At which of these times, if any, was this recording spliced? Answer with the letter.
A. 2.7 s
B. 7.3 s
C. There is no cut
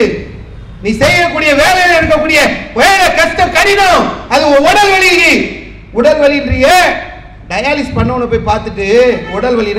C